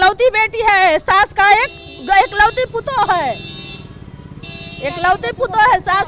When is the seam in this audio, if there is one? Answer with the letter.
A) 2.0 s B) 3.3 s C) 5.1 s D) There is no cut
D